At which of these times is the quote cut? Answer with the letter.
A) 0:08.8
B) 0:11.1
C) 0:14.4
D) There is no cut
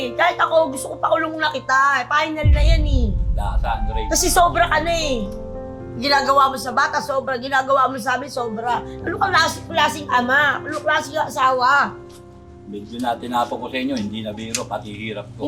D